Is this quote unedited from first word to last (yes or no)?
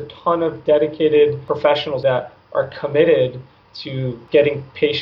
no